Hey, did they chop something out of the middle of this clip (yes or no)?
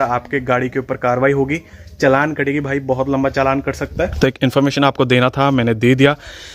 no